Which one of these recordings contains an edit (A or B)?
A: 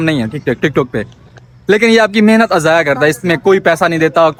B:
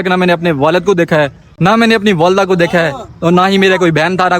B